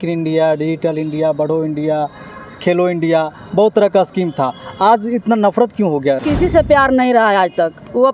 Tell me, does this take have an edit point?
yes; 1 cut; at 6.2 s

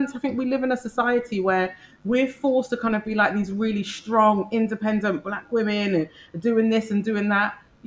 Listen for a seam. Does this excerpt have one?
no; 0 cuts

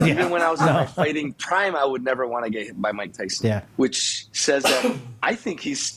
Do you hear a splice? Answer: yes; 1 cut; at 3.7 s

